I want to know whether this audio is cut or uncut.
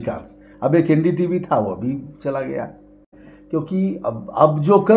cut